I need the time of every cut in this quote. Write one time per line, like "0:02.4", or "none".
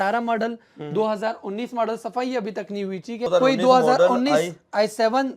0:03.3